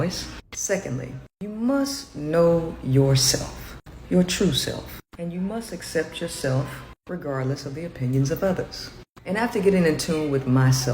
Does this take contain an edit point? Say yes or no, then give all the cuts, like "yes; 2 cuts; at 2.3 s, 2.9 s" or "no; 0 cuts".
yes; 2 cuts; at 4.0 s, 9.0 s